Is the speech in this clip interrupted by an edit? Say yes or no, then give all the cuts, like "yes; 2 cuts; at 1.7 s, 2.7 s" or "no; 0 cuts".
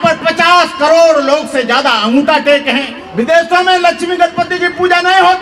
yes; 1 cut; at 3.0 s